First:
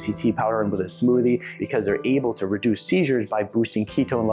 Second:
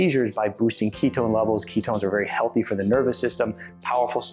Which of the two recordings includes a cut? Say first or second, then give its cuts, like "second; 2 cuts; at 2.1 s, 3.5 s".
first; 1 cut; at 1.5 s